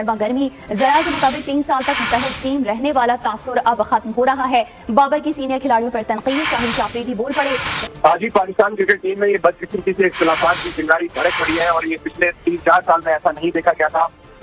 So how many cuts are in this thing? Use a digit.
0